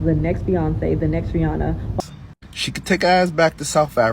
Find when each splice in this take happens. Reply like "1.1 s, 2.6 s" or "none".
1.9 s